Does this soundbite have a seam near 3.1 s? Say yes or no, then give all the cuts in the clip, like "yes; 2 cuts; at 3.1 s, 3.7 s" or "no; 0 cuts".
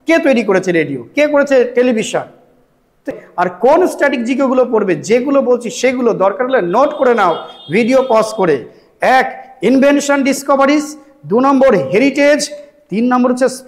yes; 1 cut; at 3.1 s